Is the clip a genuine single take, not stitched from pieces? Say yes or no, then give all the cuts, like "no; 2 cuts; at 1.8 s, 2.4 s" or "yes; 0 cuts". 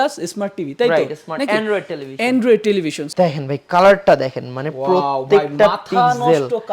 no; 1 cut; at 3.0 s